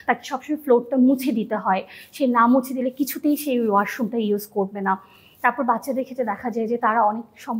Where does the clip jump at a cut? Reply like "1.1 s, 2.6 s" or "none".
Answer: none